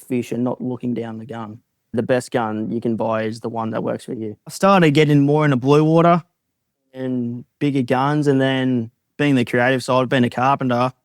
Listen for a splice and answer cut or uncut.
cut